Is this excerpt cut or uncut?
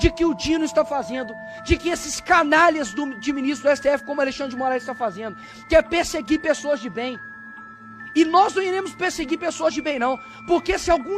uncut